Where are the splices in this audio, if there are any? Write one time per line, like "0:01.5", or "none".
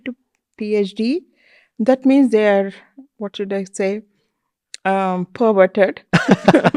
none